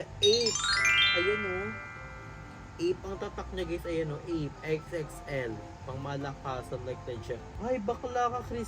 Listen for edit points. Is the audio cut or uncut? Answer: cut